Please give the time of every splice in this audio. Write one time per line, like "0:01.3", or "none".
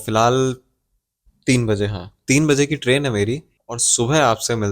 0:03.5